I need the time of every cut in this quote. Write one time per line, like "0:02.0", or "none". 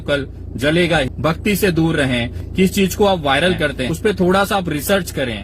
0:01.1
0:02.4
0:03.9